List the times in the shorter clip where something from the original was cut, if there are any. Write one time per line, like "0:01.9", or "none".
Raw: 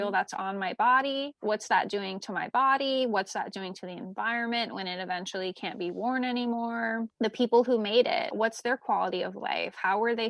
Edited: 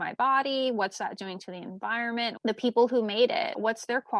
0:02.4